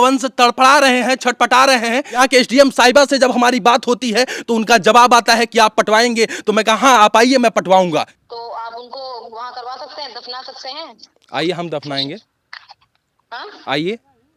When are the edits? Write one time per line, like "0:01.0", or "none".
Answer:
none